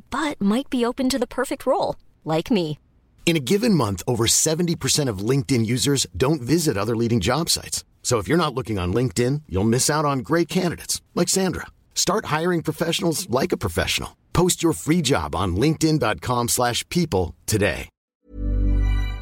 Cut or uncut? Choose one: cut